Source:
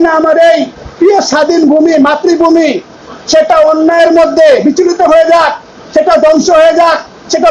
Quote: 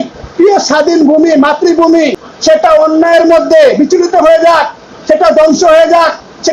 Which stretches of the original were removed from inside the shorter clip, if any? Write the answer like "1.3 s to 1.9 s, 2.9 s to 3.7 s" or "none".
2.9 s to 3.1 s